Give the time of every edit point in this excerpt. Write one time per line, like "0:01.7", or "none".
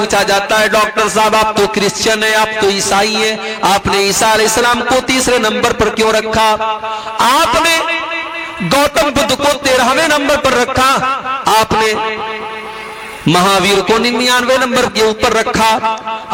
none